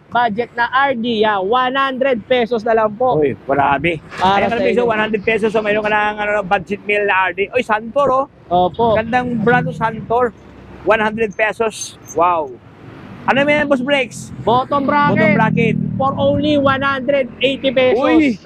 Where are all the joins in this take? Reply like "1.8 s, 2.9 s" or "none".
none